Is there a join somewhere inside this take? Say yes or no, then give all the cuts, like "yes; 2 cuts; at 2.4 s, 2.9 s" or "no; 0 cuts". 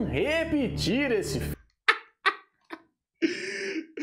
yes; 1 cut; at 1.7 s